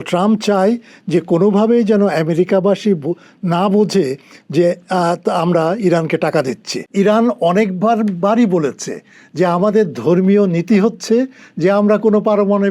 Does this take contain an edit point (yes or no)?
yes